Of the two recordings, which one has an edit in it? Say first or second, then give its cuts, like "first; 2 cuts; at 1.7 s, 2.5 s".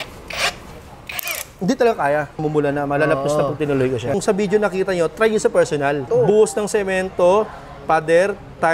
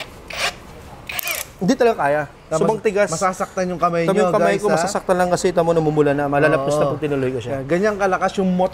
first; 3 cuts; at 2.4 s, 4.1 s, 6.0 s